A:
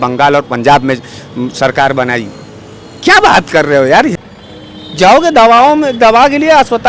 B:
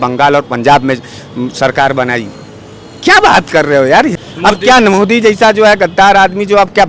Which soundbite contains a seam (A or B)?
A